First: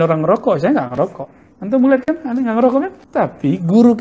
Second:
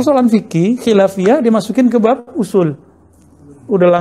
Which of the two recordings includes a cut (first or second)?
first